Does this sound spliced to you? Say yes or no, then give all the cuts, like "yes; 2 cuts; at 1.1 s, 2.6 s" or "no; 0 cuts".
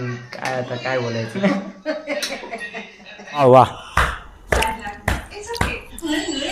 yes; 2 cuts; at 1.3 s, 3.4 s